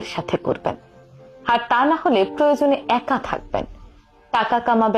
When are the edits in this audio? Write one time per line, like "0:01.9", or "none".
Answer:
none